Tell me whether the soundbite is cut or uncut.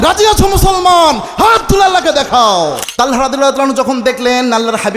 cut